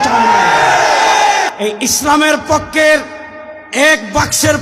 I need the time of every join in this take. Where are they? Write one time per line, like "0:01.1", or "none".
0:01.5